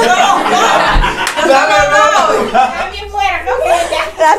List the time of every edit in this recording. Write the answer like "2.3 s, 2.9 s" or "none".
2.7 s